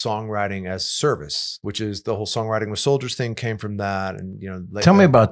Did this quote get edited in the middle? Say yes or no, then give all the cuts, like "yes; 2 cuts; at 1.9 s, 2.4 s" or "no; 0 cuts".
yes; 1 cut; at 1.6 s